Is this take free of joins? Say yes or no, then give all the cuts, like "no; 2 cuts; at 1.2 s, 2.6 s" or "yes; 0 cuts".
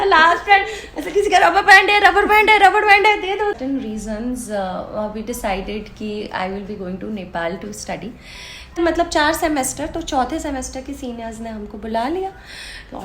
no; 2 cuts; at 3.6 s, 8.8 s